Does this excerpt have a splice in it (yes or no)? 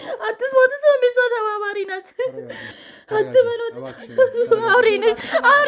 yes